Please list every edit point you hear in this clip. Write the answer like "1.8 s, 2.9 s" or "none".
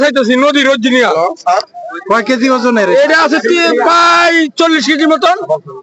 none